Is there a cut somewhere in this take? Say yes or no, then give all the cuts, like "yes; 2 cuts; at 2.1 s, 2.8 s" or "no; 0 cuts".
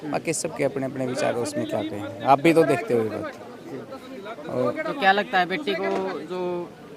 no; 0 cuts